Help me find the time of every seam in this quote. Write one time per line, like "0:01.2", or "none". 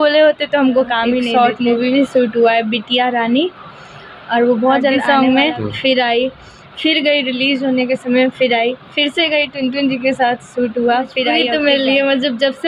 0:01.3
0:05.0
0:11.5